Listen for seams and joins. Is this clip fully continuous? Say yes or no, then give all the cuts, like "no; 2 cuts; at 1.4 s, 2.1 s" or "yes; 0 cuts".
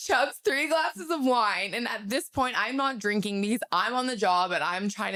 yes; 0 cuts